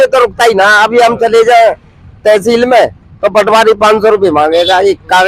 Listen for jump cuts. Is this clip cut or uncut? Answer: uncut